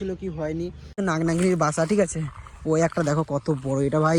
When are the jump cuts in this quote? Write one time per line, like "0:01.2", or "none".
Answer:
0:01.0